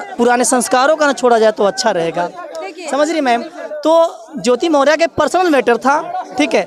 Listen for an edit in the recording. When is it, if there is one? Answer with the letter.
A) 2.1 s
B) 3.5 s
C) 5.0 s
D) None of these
D